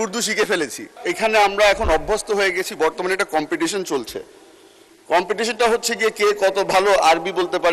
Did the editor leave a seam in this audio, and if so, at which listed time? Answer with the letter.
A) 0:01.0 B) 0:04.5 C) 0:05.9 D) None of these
A